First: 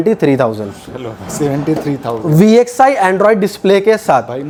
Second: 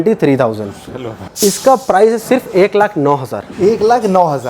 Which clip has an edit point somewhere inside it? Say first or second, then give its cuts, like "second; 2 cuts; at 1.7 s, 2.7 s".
second; 1 cut; at 1.3 s